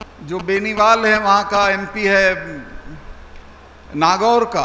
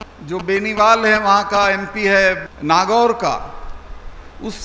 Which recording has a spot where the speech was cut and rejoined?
second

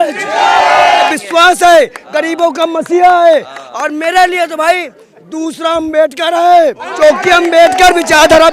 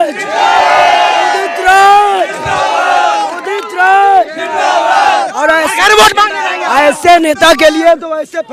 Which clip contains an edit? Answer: first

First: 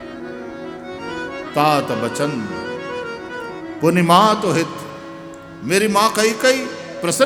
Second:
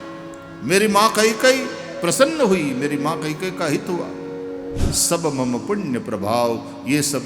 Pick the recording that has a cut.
second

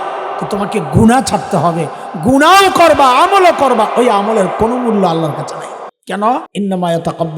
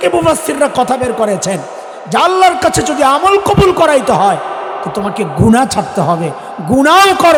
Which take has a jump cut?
first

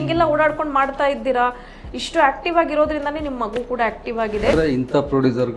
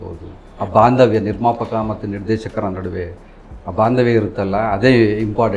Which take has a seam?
first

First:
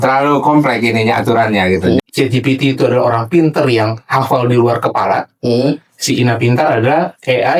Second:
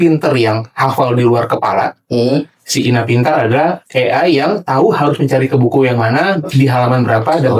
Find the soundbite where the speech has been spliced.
first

